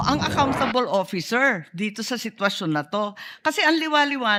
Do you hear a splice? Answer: no; 0 cuts

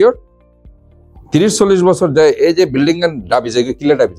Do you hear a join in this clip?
no; 0 cuts

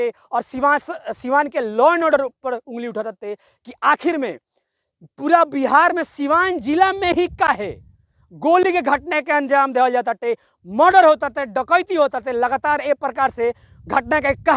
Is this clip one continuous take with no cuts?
yes; 0 cuts

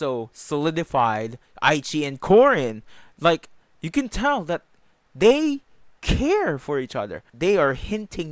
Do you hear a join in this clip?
yes; 1 cut; at 7.2 s

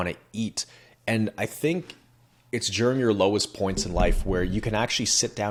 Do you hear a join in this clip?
no; 0 cuts

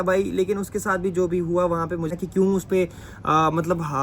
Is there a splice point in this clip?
yes; 1 cut; at 2.1 s

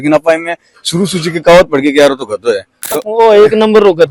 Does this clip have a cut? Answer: yes; 1 cut; at 2.7 s

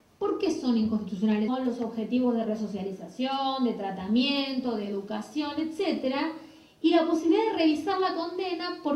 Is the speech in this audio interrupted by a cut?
no; 0 cuts

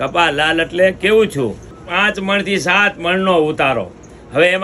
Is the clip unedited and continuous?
no; 1 cut; at 1.7 s

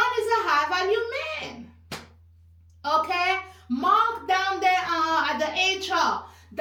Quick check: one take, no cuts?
yes; 0 cuts

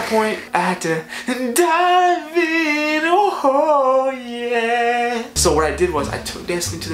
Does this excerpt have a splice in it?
yes; 1 cut; at 5.4 s

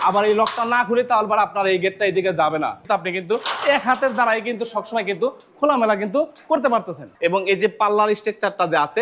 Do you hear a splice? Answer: yes; 2 cuts; at 2.8 s, 7.1 s

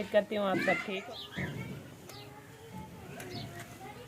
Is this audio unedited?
no; 1 cut; at 0.9 s

